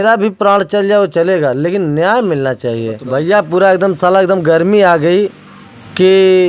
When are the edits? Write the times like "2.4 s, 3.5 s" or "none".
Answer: 3.0 s